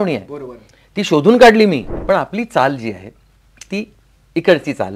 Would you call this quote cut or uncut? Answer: cut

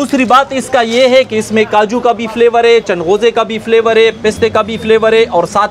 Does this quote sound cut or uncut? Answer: uncut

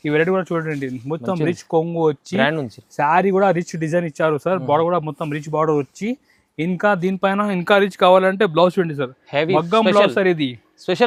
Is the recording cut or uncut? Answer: uncut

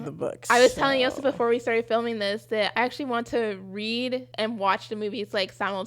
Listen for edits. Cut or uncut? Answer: cut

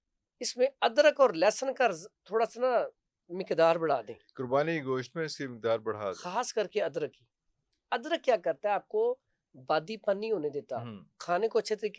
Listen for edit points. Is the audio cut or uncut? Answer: uncut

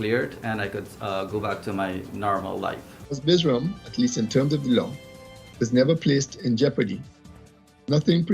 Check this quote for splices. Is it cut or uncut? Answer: cut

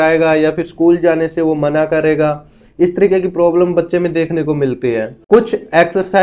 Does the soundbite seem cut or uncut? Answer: cut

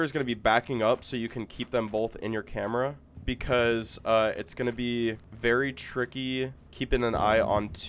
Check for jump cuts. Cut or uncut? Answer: cut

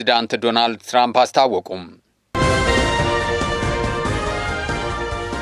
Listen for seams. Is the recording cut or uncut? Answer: cut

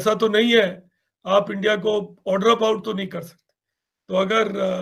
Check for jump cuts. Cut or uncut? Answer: uncut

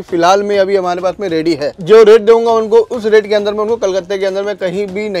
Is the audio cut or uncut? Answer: cut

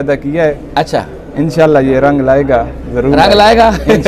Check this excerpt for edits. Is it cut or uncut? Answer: uncut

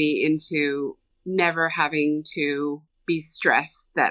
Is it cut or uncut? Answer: cut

